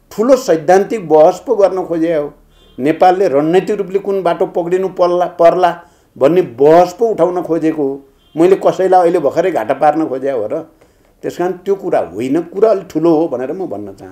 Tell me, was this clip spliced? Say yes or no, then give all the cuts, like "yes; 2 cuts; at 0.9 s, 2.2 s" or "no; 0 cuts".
no; 0 cuts